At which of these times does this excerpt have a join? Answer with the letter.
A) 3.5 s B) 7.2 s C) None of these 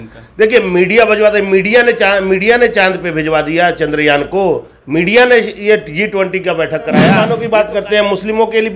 B